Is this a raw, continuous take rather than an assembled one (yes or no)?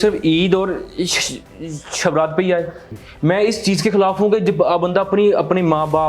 no